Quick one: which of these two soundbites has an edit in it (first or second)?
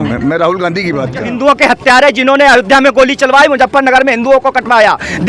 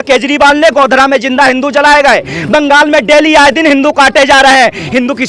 first